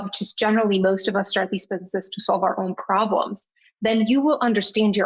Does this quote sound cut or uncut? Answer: uncut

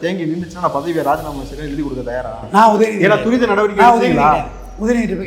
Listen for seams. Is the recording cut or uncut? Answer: uncut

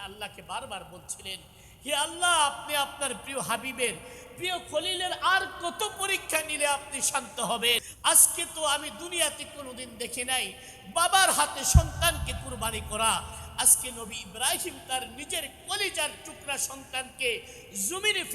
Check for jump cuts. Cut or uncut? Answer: cut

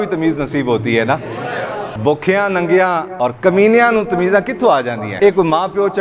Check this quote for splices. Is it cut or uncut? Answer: cut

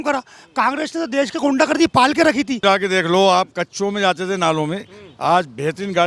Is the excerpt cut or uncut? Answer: cut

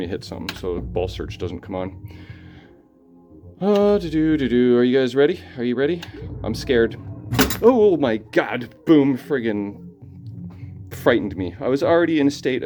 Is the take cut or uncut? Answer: uncut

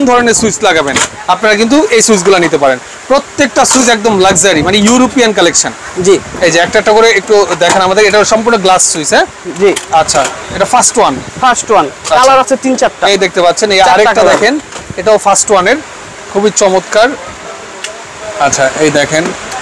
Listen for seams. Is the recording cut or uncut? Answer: uncut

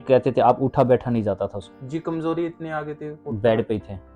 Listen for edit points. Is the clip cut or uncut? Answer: cut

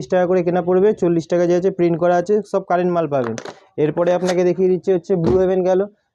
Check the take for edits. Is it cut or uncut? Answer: uncut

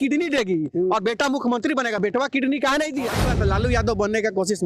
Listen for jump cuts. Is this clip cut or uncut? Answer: cut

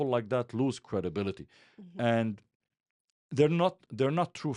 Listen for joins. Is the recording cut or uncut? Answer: uncut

